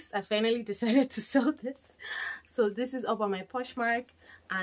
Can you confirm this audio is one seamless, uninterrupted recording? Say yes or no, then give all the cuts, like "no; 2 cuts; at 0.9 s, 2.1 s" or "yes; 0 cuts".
yes; 0 cuts